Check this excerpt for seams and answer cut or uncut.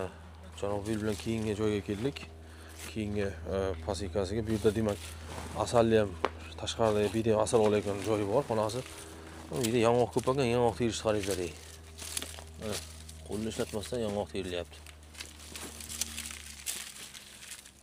uncut